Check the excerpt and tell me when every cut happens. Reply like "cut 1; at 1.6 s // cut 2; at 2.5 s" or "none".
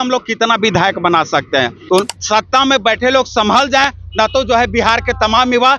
cut 1; at 1.8 s